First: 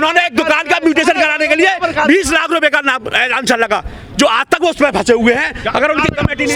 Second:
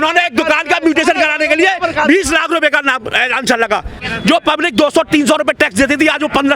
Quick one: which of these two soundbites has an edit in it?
second; 1 cut; at 4.1 s

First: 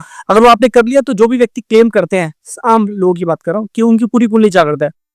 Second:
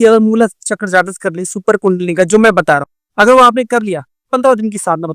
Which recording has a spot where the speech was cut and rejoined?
second; 1 cut; at 3.0 s

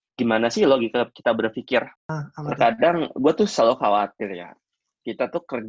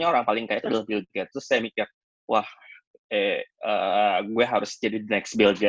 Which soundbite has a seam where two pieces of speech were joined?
first; 1 cut; at 2.0 s

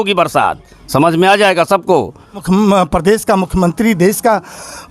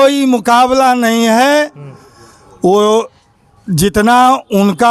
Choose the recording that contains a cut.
first; 1 cut; at 2.4 s

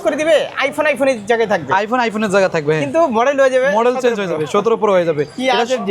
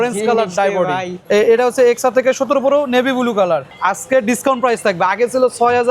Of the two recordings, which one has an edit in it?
second; 2 cuts; at 1.1 s, 3.7 s

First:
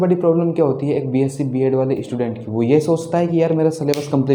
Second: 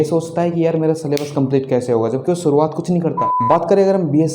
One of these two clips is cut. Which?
second; 1 cut; at 3.3 s

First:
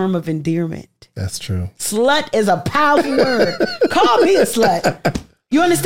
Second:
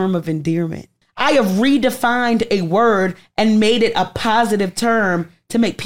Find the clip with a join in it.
second; 1 cut; at 1.1 s

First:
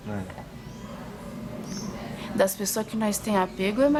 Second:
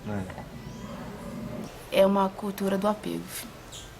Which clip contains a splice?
second; 1 cut; at 1.7 s

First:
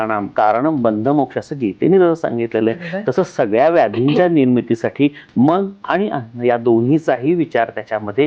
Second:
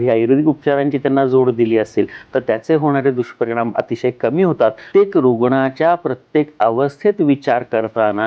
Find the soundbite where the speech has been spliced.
second; 1 cut; at 4.8 s

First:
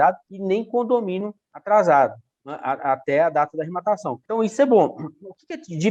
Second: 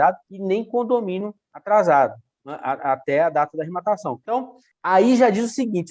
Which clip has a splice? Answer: second; 1 cut; at 4.2 s

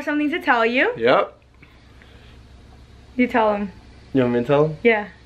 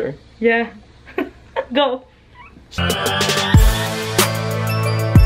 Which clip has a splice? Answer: second; 1 cut; at 2.8 s

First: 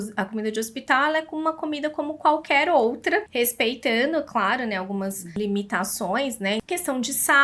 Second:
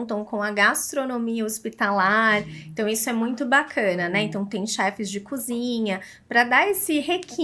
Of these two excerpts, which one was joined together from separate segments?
first; 3 cuts; at 3.3 s, 5.4 s, 6.6 s

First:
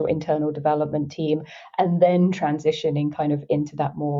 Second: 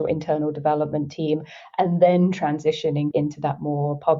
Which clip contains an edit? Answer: second; 1 cut; at 3.1 s

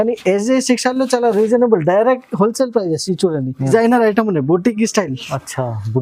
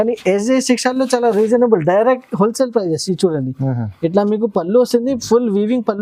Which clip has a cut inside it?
first; 1 cut; at 3.7 s

